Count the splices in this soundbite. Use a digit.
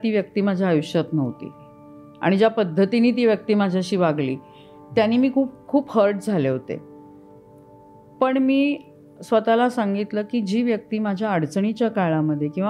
0